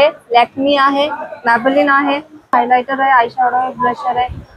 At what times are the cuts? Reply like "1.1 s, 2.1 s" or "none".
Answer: 2.5 s